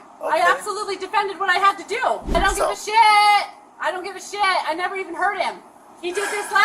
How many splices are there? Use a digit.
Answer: 1